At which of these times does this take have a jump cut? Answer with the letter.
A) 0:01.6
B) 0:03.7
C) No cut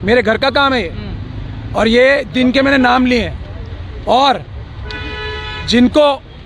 C